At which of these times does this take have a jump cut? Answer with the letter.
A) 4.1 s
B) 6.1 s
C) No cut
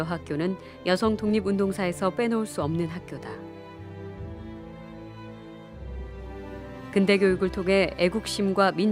B